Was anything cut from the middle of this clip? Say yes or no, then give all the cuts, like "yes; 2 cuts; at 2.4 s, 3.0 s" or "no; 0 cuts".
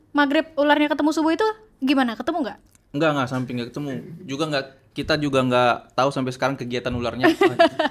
no; 0 cuts